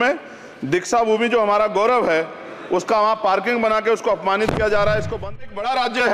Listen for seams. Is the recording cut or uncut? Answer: cut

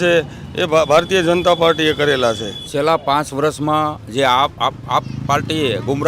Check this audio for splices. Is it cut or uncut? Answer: cut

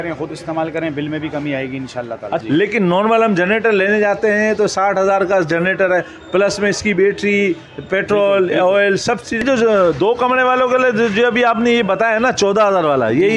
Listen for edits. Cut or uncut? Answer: cut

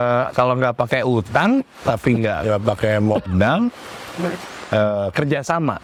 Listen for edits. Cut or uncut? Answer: uncut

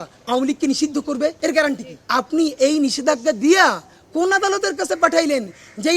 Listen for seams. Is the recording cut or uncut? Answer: cut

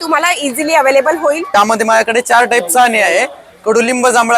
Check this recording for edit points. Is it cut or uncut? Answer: cut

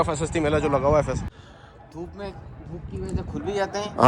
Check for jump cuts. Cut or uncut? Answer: cut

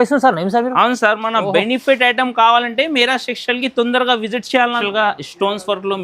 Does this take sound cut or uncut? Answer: cut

